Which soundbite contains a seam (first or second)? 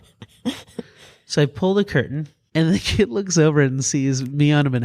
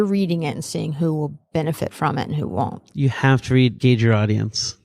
second